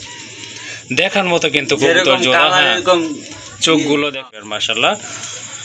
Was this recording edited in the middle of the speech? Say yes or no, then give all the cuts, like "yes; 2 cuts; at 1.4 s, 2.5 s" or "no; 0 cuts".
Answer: yes; 1 cut; at 4.3 s